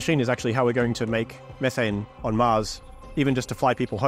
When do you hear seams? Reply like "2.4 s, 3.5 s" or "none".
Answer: 1.4 s